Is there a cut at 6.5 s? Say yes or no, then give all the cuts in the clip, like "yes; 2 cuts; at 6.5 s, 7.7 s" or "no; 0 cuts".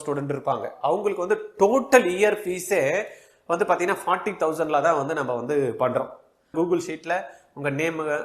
yes; 1 cut; at 6.5 s